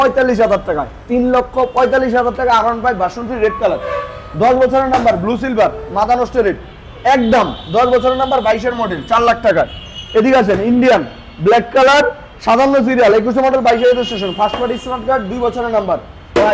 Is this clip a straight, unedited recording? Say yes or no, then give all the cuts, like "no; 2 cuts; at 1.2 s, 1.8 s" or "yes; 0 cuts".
yes; 0 cuts